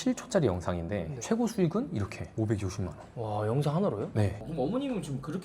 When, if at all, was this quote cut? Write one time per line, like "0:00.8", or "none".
0:04.4